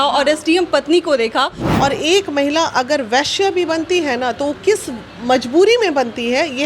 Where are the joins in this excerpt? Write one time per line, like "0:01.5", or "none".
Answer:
0:01.6